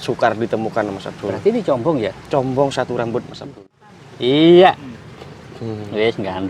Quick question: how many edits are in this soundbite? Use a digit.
1